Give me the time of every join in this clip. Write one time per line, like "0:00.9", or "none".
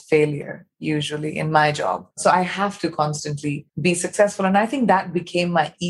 0:02.1
0:03.7